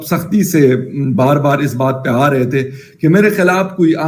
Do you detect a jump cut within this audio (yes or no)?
no